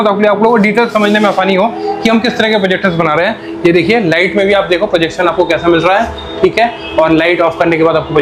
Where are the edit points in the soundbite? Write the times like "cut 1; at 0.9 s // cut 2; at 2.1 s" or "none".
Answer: none